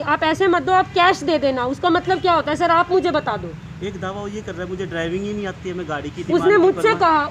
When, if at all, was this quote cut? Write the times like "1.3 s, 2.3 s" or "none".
none